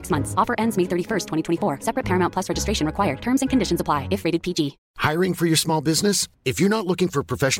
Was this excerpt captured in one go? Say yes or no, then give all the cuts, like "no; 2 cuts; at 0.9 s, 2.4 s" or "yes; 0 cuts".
no; 1 cut; at 4.8 s